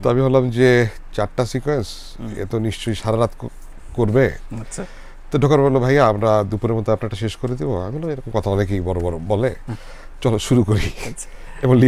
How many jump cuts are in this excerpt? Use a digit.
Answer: 0